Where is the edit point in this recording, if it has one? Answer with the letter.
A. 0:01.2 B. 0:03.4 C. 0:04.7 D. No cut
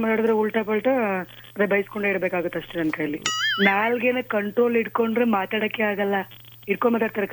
B